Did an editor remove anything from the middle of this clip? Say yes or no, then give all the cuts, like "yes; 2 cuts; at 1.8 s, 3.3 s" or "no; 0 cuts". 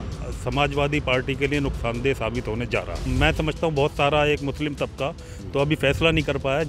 yes; 1 cut; at 3.0 s